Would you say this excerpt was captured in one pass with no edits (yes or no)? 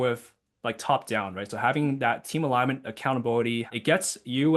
no